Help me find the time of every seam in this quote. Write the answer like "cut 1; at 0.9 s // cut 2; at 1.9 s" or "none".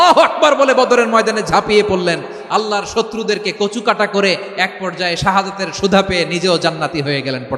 none